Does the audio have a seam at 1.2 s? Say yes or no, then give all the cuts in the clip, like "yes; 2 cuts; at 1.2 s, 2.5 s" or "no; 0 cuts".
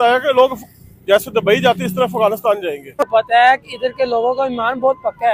no; 1 cut; at 3.1 s